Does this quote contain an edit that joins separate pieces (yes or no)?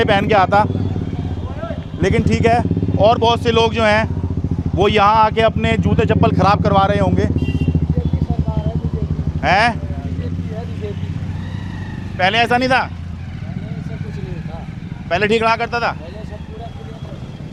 no